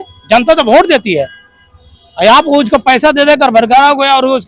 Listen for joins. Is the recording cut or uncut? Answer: uncut